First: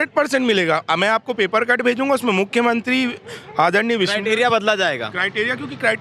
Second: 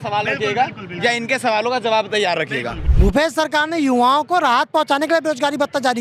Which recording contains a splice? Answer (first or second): second